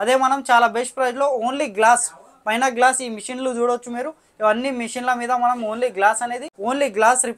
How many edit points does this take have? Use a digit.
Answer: 1